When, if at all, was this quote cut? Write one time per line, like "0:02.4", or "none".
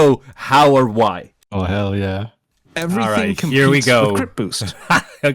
0:01.3